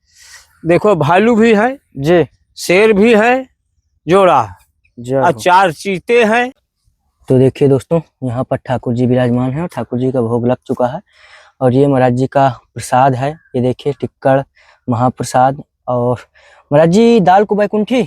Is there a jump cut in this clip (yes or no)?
yes